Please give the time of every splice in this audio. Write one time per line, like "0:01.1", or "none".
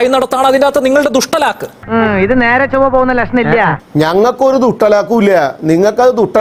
none